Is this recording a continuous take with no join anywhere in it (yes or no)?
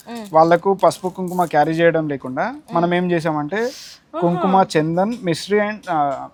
yes